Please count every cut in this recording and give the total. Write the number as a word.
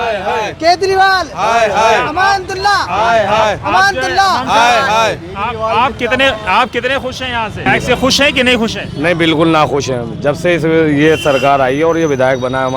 one